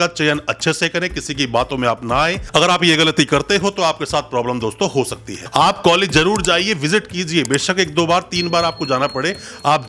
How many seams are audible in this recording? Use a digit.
1